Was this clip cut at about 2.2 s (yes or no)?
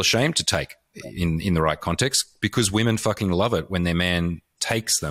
no